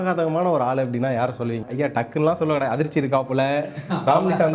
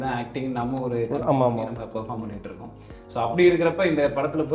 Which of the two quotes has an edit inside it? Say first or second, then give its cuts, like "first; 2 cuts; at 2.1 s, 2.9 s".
first; 1 cut; at 1.6 s